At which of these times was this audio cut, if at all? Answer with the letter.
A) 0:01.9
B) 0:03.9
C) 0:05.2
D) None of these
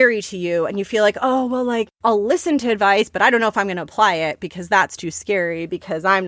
A